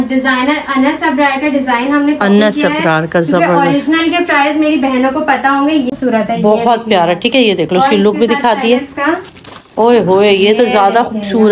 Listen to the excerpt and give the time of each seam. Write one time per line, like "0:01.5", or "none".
0:05.9